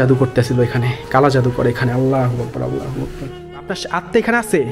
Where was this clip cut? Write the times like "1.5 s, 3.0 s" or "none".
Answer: 3.8 s